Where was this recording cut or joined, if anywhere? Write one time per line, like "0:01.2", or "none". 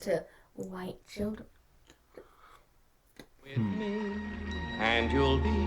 0:03.7